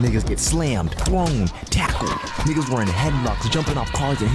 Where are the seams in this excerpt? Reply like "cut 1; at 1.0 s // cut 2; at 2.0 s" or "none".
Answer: none